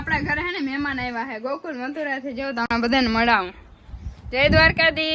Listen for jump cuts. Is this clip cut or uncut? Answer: uncut